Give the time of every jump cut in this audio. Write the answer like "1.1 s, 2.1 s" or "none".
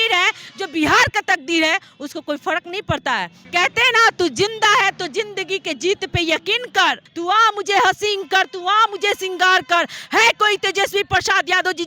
3.4 s, 7.1 s